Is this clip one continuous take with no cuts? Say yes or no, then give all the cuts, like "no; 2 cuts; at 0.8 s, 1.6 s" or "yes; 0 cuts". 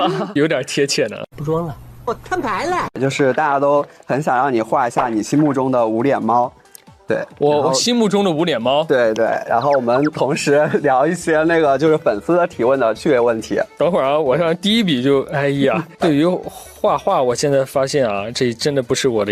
yes; 0 cuts